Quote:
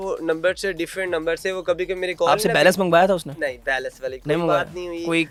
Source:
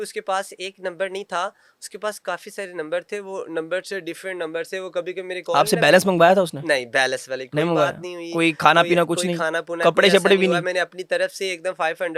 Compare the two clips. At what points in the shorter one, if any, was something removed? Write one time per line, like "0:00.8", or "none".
none